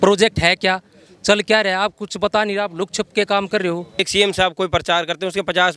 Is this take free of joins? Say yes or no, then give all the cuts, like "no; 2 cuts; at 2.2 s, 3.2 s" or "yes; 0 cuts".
no; 1 cut; at 4.1 s